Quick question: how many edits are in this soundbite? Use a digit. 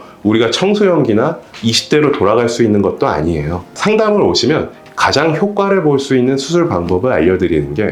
2